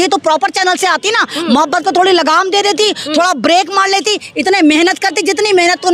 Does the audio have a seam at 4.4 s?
no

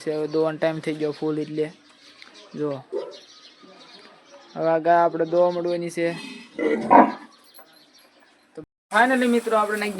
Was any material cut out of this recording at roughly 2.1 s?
no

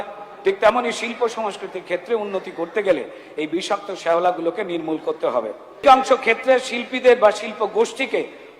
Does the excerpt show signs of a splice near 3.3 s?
no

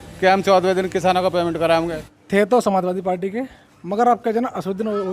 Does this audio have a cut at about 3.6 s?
no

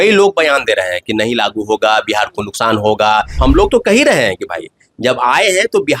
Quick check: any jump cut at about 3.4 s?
yes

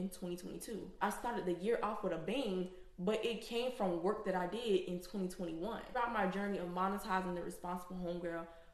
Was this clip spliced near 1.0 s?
yes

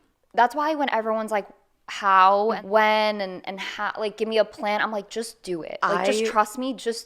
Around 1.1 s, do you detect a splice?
no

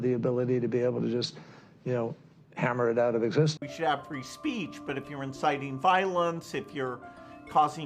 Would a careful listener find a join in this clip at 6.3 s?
no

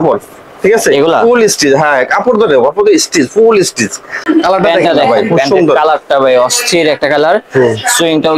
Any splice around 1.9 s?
no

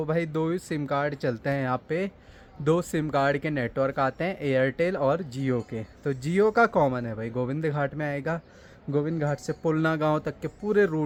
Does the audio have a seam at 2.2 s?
no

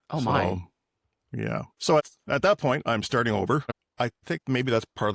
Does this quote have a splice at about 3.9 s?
yes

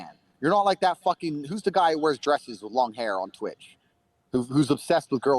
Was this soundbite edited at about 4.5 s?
yes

